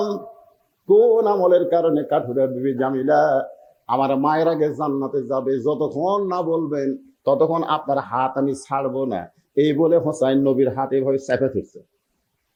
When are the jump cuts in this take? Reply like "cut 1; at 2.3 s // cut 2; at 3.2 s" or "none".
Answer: none